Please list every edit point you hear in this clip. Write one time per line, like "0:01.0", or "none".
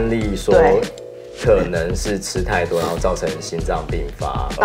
none